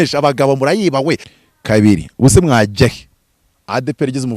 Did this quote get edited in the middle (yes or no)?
yes